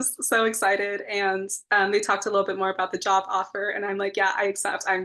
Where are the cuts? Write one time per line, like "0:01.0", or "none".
none

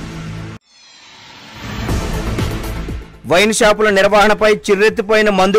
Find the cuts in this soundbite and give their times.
0:02.4

